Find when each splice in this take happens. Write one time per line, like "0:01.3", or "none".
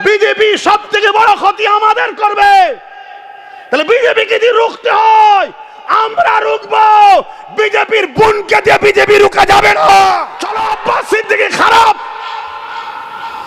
0:10.7